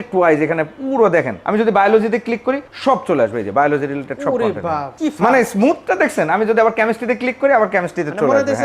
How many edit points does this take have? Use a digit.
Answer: 3